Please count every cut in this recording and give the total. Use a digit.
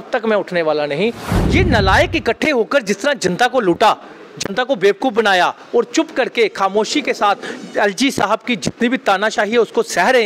1